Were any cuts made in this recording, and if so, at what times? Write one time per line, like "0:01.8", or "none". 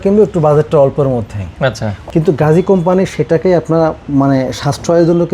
0:02.0